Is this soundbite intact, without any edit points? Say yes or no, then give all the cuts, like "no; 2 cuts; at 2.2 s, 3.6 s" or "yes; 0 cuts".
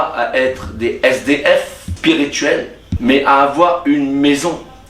no; 2 cuts; at 1.8 s, 2.8 s